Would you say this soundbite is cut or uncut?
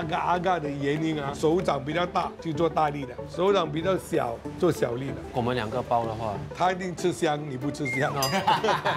cut